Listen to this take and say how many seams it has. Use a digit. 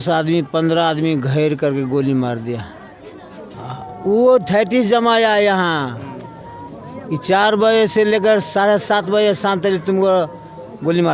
1